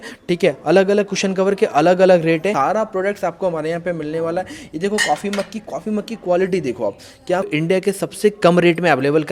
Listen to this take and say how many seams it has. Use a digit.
2